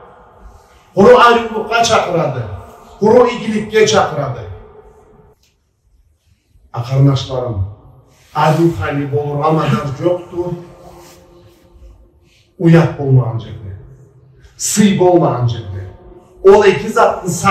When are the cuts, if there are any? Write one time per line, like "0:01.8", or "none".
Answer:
0:05.3